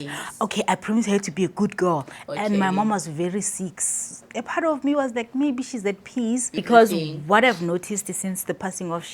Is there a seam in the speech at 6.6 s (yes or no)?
yes